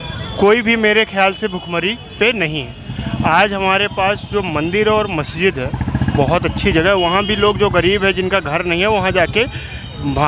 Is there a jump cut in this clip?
no; 0 cuts

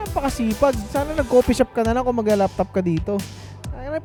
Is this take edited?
no; 0 cuts

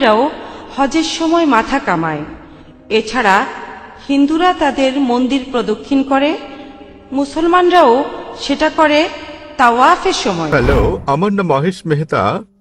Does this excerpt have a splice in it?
yes; 1 cut; at 10.5 s

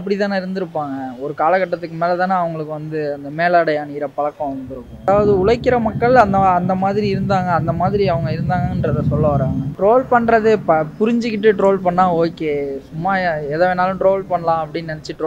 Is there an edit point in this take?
yes; 2 cuts; at 5.1 s, 9.7 s

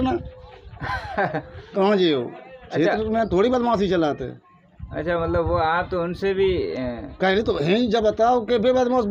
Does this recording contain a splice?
no; 0 cuts

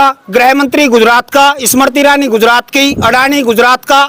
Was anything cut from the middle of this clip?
no; 0 cuts

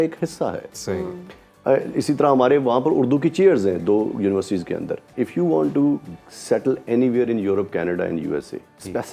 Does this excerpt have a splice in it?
yes; 1 cut; at 5.1 s

